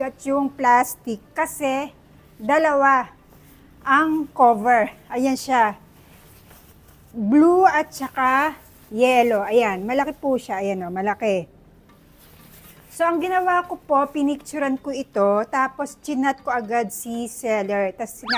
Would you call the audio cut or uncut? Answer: uncut